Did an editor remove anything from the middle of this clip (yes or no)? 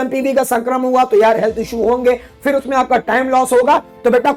no